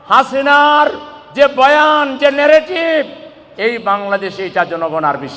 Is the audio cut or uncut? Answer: uncut